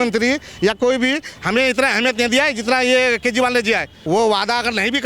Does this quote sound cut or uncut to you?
cut